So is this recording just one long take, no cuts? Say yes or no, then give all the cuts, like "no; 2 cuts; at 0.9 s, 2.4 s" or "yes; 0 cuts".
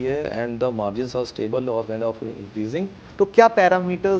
no; 1 cut; at 3.0 s